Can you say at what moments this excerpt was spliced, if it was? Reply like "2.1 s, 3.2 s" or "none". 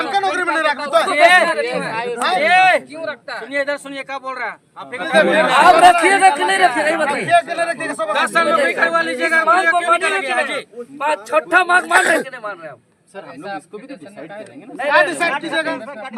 5.1 s

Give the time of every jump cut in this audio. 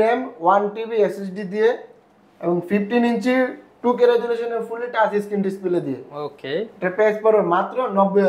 none

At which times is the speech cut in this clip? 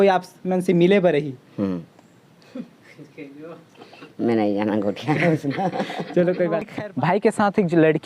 6.7 s

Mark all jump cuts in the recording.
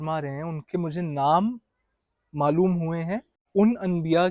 3.4 s

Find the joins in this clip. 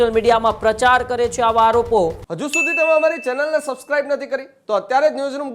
2.3 s

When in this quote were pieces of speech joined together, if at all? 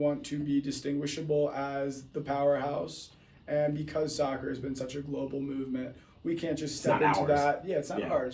none

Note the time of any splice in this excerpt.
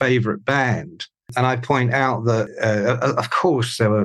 1.3 s

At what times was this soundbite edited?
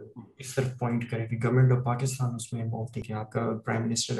3.0 s

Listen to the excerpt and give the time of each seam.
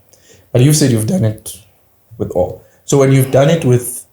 none

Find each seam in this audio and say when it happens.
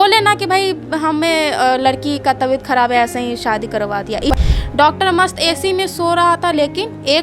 4.4 s

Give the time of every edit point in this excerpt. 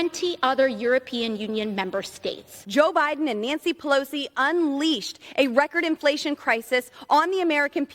2.6 s

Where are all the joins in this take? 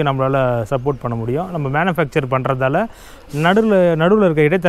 none

